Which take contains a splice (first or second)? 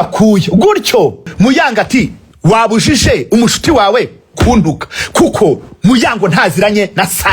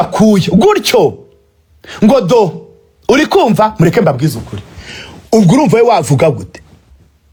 first